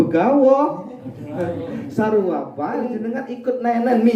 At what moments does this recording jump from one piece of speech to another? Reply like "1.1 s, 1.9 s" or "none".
2.9 s